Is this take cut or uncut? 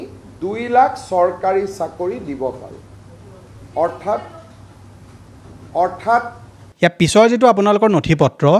cut